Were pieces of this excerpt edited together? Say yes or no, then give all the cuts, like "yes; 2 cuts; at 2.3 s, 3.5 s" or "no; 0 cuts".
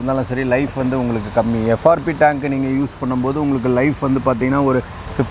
no; 0 cuts